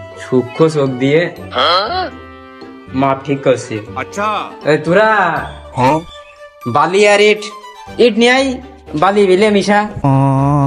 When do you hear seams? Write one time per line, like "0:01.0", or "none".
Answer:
none